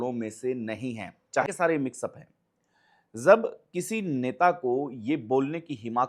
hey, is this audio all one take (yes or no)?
no